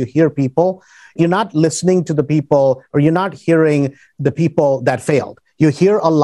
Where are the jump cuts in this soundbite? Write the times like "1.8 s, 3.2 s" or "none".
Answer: 1.2 s